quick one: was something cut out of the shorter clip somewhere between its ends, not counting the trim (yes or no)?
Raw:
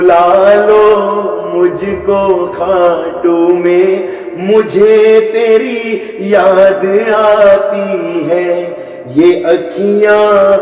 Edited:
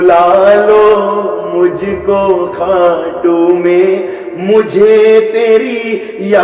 no